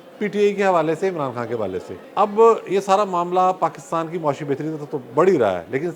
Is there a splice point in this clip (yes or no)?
yes